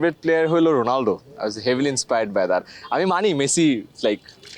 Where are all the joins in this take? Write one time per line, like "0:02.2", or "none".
none